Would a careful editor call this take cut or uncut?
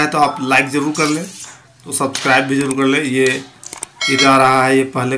cut